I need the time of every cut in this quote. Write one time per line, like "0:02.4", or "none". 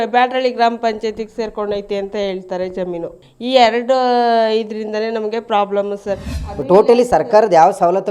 0:06.3

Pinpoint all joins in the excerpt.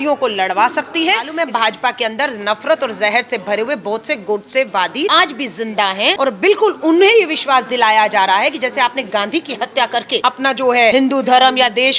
0:01.3
0:05.1
0:06.2
0:10.2
0:10.9

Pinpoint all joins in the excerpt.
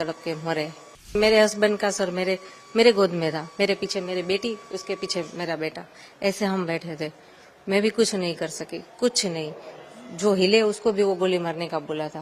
0:01.1

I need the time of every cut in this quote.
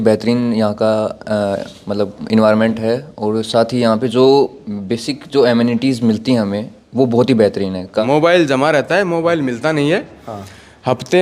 0:07.9

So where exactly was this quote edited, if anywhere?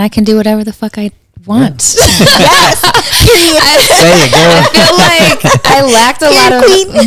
none

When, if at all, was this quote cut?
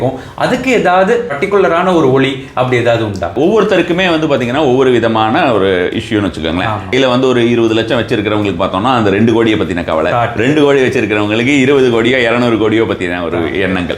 0:01.3
0:03.3
0:06.9

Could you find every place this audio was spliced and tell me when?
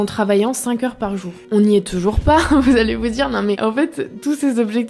none

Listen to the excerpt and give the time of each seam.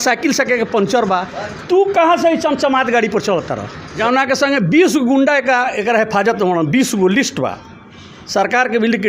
0:04.0

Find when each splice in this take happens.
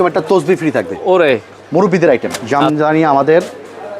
0:02.4

